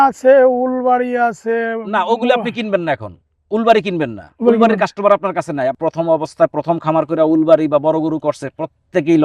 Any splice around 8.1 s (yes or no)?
no